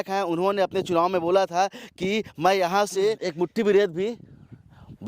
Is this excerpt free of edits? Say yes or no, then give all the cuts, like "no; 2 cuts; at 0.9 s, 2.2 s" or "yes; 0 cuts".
no; 1 cut; at 3.2 s